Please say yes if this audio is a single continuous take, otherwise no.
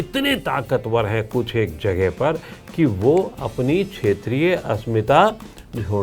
yes